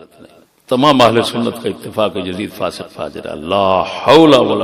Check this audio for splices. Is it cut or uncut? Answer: uncut